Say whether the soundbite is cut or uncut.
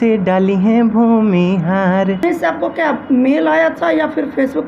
cut